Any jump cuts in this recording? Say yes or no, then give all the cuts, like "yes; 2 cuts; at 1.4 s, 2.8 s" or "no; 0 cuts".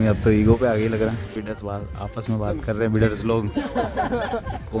no; 0 cuts